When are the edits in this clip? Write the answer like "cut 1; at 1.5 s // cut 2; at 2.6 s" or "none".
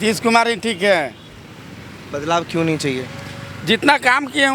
none